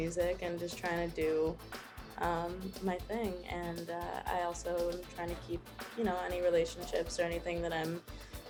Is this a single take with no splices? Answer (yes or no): yes